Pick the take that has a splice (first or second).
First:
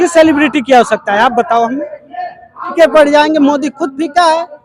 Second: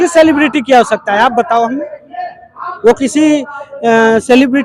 first